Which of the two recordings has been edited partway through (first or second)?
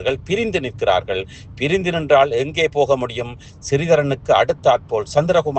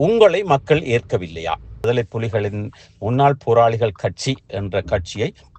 second